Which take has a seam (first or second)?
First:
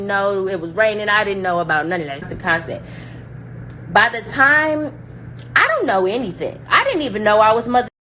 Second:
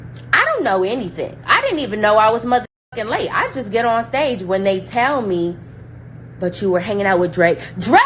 first